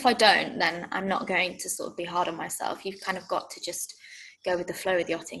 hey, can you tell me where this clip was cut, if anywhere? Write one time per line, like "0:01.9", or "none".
none